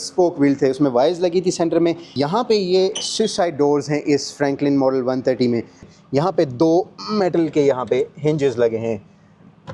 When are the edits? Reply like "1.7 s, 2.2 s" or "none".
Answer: 2.2 s, 5.9 s